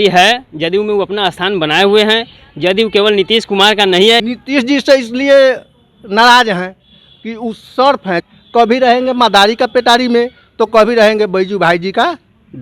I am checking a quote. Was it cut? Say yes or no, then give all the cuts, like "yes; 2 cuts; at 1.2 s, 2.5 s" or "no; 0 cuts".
yes; 2 cuts; at 4.2 s, 8.2 s